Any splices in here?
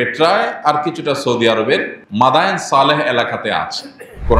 yes; 1 cut; at 2.0 s

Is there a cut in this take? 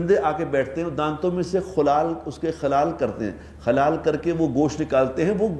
no; 0 cuts

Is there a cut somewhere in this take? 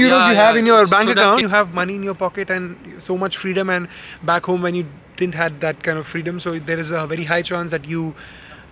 yes; 1 cut; at 1.4 s

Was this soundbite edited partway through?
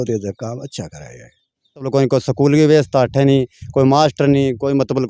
yes; 1 cut; at 1.9 s

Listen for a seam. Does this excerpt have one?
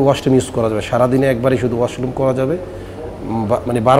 no; 0 cuts

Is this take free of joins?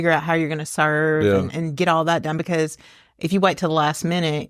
yes; 0 cuts

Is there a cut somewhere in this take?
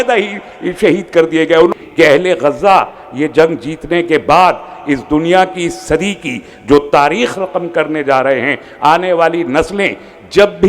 yes; 1 cut; at 1.7 s

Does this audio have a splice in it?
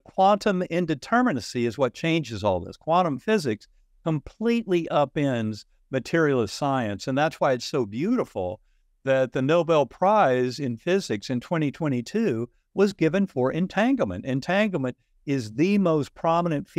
no; 0 cuts

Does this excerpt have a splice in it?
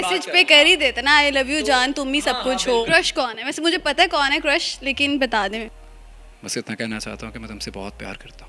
yes; 2 cuts; at 2.9 s, 5.8 s

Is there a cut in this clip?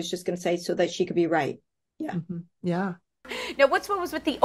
yes; 1 cut; at 3.4 s

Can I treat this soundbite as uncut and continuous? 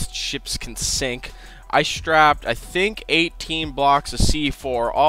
yes; 0 cuts

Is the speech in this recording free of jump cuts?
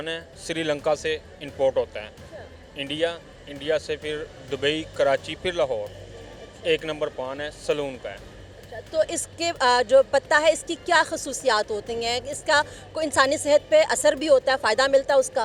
yes; 0 cuts

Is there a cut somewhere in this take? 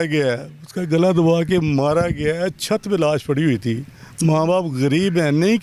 no; 0 cuts

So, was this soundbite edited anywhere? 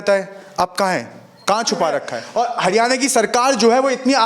yes; 1 cut; at 2.2 s

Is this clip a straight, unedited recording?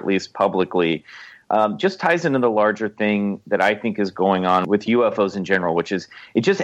no; 1 cut; at 4.6 s

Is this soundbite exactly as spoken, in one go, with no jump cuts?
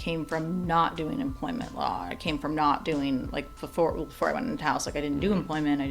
yes; 0 cuts

